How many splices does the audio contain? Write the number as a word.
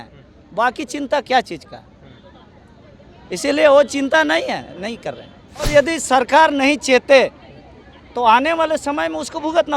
one